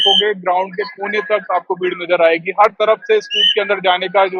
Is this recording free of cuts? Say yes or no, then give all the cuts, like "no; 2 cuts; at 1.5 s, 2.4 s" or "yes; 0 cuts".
yes; 0 cuts